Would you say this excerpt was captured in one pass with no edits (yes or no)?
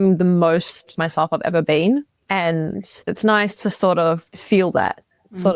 no